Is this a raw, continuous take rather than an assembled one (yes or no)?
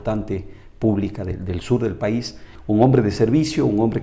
no